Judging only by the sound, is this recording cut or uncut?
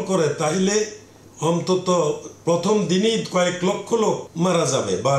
cut